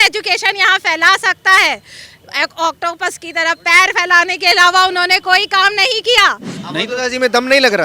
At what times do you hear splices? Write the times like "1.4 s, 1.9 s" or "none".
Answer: 6.5 s